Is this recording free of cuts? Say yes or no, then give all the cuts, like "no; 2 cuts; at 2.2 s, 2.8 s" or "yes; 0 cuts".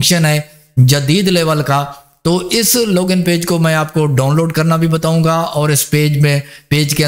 yes; 0 cuts